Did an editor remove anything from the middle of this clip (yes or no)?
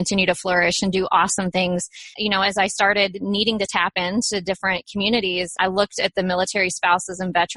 yes